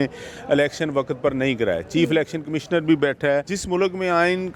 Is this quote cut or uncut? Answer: cut